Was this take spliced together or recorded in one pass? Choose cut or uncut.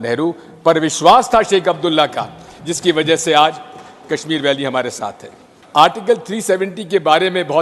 cut